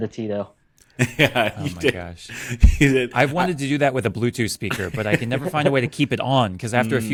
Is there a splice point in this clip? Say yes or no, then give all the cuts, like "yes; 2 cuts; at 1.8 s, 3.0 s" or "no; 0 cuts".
no; 0 cuts